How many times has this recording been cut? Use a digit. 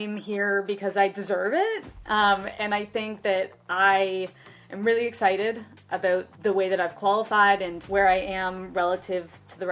2